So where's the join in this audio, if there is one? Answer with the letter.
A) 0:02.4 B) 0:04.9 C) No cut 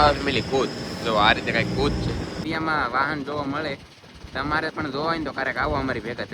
A